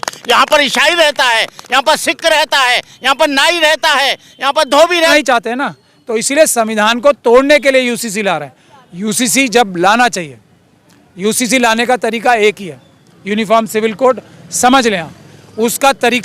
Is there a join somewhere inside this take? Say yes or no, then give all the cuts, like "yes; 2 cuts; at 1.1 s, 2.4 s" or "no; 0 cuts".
yes; 1 cut; at 5.1 s